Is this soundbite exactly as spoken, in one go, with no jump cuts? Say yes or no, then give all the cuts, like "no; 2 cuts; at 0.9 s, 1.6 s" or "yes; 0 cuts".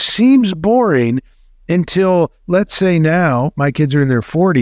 yes; 0 cuts